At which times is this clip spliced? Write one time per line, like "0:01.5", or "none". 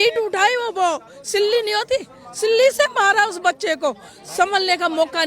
none